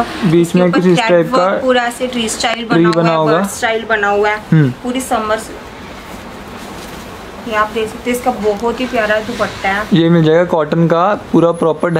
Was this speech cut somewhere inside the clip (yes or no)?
no